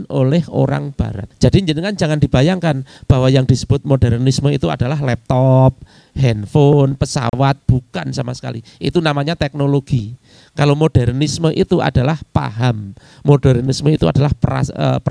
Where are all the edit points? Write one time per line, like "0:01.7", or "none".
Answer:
0:01.2